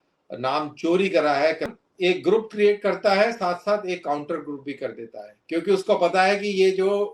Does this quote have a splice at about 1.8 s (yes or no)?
yes